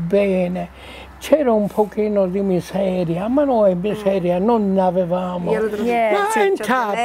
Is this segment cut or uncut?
cut